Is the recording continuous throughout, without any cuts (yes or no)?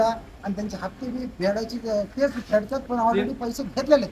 yes